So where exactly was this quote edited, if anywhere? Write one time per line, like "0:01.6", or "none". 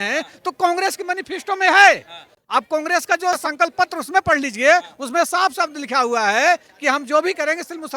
none